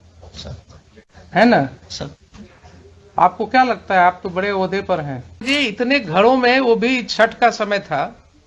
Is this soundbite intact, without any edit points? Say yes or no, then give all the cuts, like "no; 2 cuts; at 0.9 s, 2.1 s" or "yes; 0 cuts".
no; 1 cut; at 5.4 s